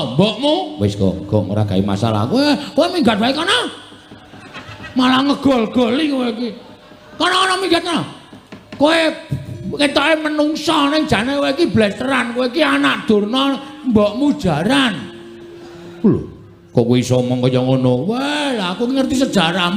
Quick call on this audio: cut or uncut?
uncut